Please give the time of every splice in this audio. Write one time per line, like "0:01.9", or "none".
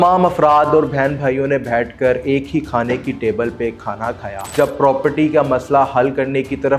0:04.4